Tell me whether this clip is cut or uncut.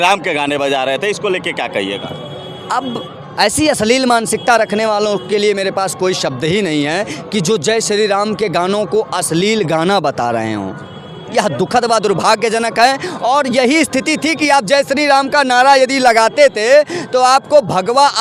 uncut